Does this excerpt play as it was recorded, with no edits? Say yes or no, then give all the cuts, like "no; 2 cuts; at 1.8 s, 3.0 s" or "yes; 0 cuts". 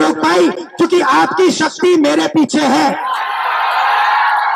yes; 0 cuts